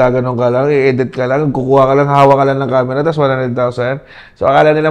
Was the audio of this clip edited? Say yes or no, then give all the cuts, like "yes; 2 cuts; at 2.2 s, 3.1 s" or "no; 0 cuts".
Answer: no; 0 cuts